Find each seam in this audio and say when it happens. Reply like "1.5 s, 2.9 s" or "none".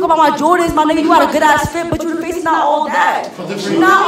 none